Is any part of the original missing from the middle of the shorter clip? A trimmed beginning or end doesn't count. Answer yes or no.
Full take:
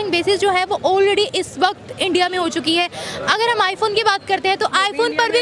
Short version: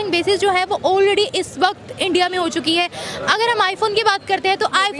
no